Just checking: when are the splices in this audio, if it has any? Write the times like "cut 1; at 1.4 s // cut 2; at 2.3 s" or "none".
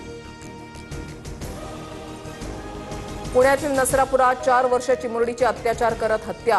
cut 1; at 1.1 s